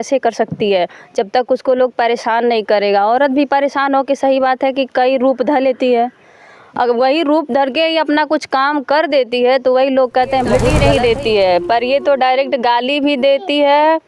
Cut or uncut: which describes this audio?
cut